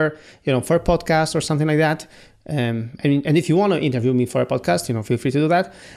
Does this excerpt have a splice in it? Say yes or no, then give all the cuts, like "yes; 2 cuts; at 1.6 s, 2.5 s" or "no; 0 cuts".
no; 0 cuts